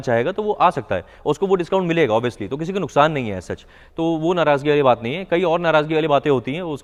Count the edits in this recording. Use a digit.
0